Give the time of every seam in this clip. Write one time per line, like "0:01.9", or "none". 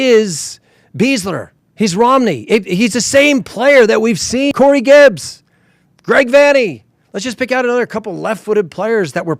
0:04.5